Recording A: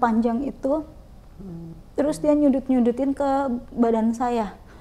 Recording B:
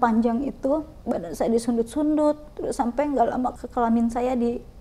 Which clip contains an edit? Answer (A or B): B